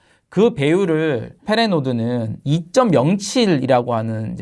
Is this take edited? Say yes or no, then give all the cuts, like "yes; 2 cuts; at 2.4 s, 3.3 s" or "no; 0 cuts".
yes; 2 cuts; at 1.4 s, 2.3 s